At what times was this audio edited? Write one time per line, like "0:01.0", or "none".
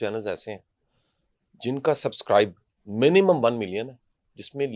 none